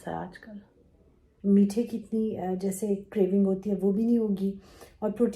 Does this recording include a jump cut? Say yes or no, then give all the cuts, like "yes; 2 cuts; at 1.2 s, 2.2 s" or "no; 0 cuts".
yes; 1 cut; at 1.2 s